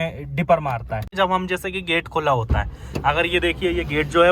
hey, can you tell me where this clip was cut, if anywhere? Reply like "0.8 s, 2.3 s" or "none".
1.1 s